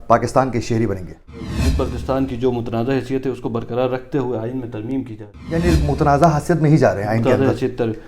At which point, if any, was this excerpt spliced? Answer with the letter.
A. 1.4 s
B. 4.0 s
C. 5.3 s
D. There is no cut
A